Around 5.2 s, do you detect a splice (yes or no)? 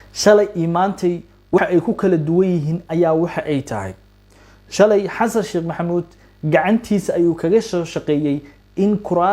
no